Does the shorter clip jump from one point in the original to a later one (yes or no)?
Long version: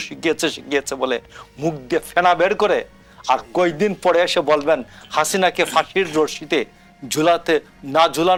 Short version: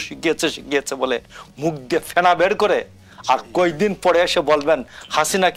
no